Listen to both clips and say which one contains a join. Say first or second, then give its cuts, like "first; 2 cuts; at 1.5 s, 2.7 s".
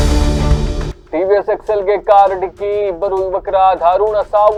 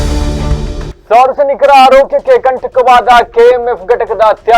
second; 1 cut; at 0.9 s